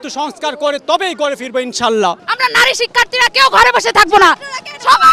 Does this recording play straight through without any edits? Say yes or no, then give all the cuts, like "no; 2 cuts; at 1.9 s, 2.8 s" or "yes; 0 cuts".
no; 1 cut; at 2.2 s